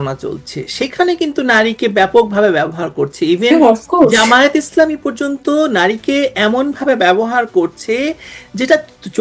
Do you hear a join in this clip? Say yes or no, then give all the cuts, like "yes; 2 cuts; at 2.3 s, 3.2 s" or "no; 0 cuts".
no; 0 cuts